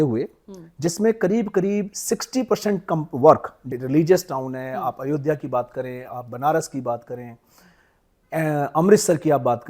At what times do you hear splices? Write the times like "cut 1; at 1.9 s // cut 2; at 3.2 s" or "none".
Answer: cut 1; at 3.6 s